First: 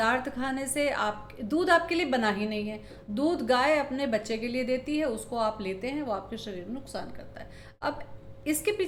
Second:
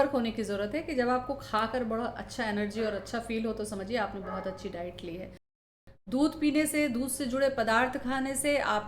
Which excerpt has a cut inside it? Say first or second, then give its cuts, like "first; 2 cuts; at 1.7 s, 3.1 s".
second; 1 cut; at 5.5 s